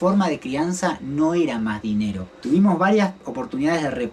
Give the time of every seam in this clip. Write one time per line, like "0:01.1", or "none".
0:02.4